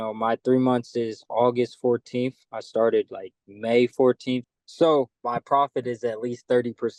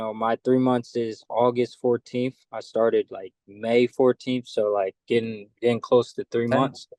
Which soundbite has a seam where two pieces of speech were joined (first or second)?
first